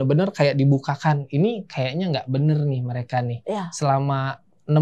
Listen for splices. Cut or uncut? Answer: uncut